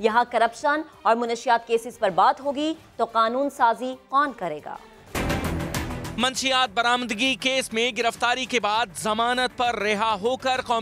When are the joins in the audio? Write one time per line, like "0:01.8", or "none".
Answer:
0:05.2